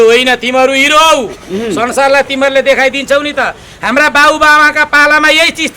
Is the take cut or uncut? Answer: uncut